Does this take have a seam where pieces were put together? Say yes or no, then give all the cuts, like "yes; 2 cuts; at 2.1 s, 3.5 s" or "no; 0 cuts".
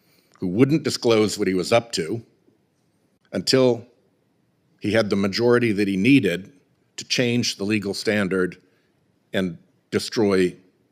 no; 0 cuts